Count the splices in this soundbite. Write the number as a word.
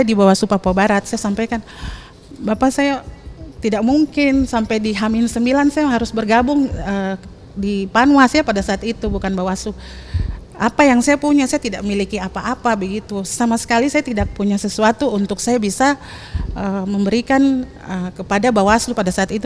zero